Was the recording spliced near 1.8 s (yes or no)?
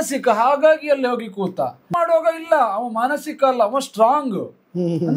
yes